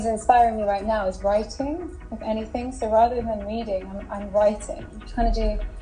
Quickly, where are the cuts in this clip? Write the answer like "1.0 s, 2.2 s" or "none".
none